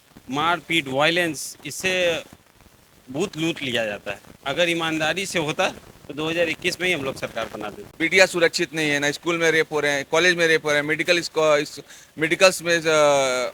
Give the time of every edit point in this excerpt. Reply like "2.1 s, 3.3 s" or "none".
7.8 s